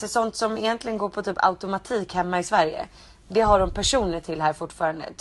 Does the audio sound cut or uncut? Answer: uncut